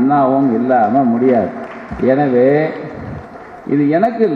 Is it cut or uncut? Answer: uncut